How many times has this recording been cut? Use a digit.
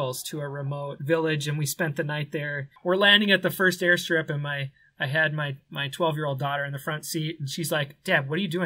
2